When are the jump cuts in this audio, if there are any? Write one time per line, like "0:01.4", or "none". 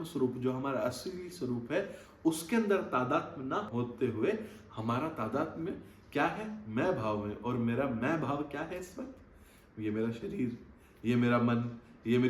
0:03.7

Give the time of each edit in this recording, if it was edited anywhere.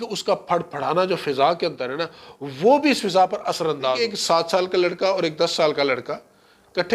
0:04.0

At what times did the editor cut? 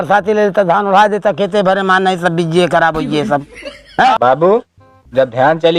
0:04.2

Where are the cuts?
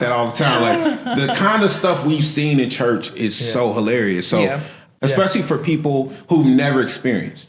0:04.9

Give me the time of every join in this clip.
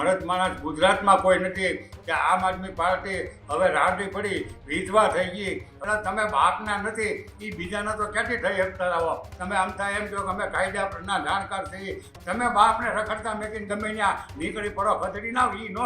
0:01.9
0:05.7
0:09.3
0:12.2

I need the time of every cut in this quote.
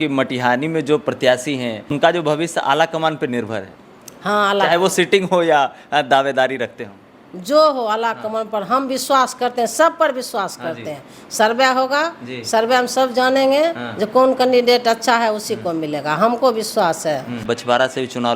0:01.9
0:17.4

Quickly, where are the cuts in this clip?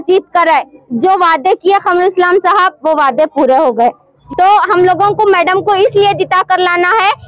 0:04.2

